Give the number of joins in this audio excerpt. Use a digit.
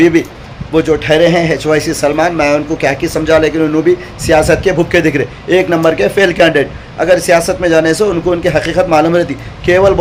0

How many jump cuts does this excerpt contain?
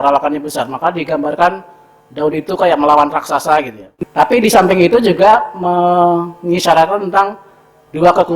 1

